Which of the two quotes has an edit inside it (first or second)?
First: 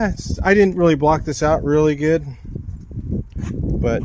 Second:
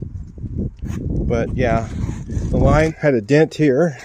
second